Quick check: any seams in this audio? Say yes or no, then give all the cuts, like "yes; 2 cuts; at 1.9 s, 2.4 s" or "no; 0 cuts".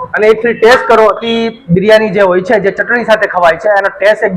yes; 1 cut; at 1.2 s